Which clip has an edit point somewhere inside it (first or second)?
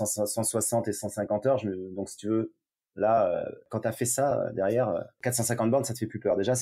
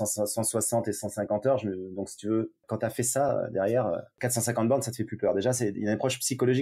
second